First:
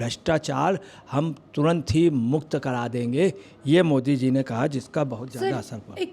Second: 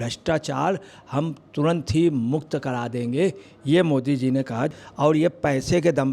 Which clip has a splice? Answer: second; 1 cut; at 4.8 s

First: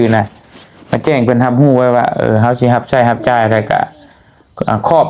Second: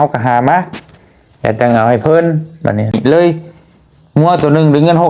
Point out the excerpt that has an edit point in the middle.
second; 1 cut; at 3.0 s

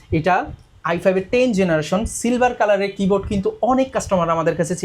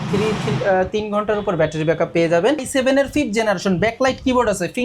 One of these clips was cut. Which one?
second; 1 cut; at 2.7 s

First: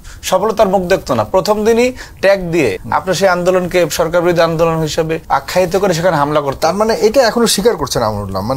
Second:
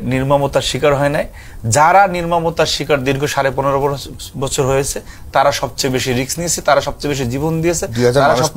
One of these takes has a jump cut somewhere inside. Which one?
first; 2 cuts; at 2.8 s, 5.2 s

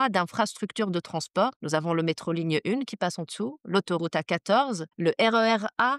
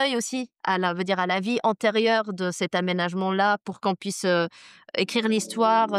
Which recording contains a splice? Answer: first; 2 cuts; at 1.6 s, 4.9 s

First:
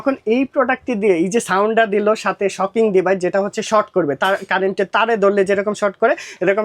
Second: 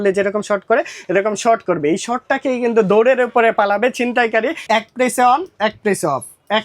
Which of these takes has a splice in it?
second; 1 cut; at 4.6 s

